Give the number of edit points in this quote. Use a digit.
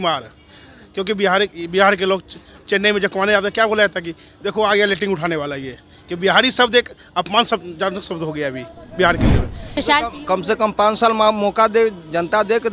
1